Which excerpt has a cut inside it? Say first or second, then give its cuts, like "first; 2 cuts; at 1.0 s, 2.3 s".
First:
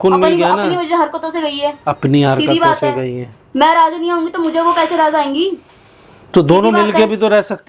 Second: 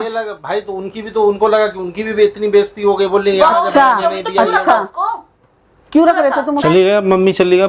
second; 1 cut; at 6.6 s